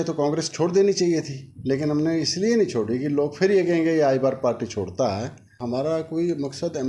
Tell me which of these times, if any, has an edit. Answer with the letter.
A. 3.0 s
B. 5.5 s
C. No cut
B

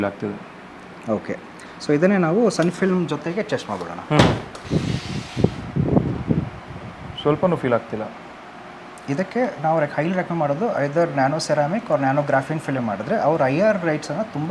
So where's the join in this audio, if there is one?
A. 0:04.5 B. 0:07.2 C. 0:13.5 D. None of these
A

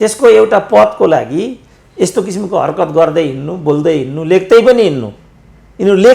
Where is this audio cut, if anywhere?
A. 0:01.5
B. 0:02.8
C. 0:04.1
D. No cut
D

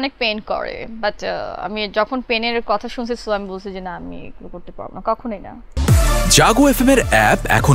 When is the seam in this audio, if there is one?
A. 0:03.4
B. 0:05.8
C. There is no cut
B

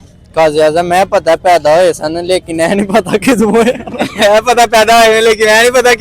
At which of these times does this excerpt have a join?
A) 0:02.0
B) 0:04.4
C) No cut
B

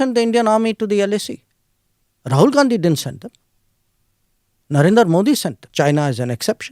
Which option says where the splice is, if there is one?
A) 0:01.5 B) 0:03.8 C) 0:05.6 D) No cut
C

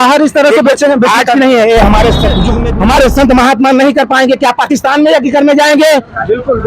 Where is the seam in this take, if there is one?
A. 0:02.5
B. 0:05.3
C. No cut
A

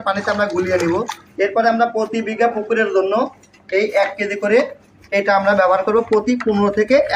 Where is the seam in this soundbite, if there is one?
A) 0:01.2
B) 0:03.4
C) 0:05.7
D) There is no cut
A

